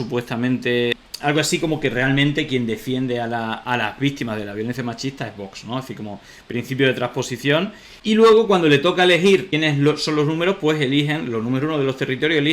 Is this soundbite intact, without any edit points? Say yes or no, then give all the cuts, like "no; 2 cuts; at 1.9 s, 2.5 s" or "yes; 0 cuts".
no; 1 cut; at 1.0 s